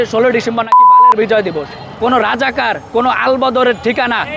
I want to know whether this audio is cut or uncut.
cut